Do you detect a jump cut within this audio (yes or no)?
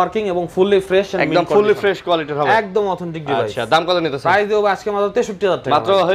no